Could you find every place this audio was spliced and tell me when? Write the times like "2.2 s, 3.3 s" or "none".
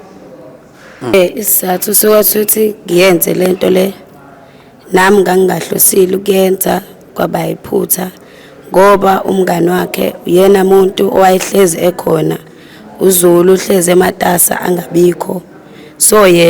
1.1 s